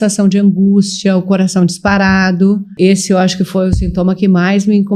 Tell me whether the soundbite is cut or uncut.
cut